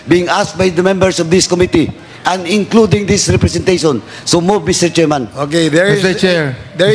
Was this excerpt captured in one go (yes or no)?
yes